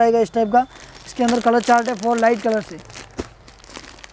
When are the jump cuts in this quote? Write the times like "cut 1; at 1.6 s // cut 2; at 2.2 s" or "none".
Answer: none